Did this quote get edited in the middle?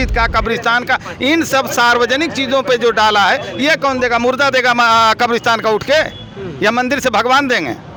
no; 0 cuts

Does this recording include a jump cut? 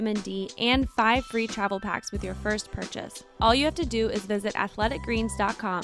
yes; 1 cut; at 3.2 s

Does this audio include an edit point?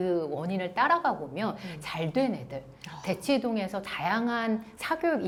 no; 0 cuts

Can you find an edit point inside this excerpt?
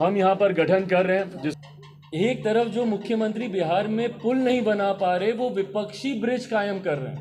yes; 1 cut; at 1.6 s

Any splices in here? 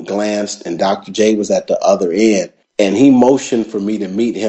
no; 0 cuts

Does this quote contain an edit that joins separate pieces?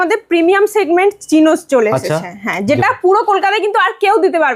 no; 0 cuts

